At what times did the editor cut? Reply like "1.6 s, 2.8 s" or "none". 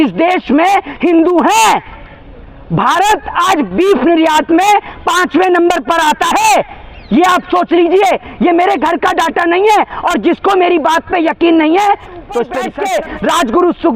12.6 s